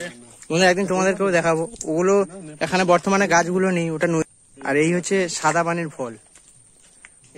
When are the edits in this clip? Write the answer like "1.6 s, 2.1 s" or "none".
4.2 s